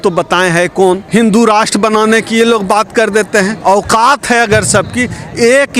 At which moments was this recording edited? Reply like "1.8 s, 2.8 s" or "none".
1.0 s, 3.5 s